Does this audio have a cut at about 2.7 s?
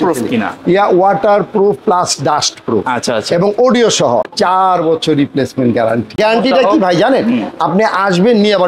no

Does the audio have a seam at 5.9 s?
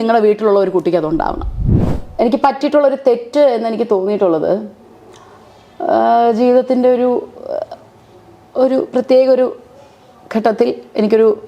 no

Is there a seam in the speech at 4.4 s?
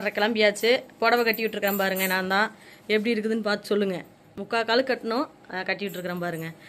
no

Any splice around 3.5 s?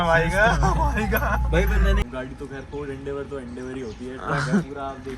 no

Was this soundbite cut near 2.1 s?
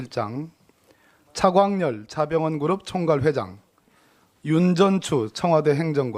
no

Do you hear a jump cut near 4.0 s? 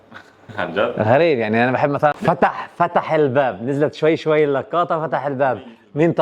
no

